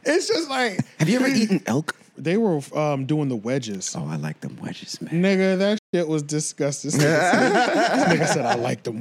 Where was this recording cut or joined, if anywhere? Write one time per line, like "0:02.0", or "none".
0:02.1